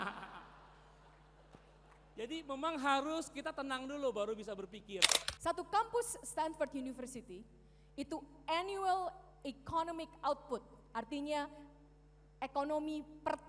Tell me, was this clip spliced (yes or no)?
yes